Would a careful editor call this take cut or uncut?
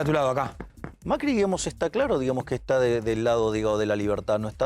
uncut